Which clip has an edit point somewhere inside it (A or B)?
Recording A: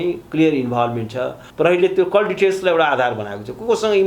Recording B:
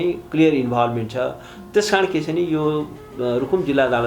A